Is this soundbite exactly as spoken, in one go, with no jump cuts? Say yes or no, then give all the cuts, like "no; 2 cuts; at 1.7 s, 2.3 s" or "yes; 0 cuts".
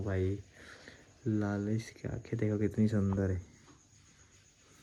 yes; 0 cuts